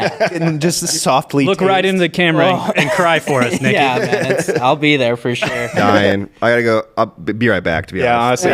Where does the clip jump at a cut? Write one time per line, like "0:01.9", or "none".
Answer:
0:05.9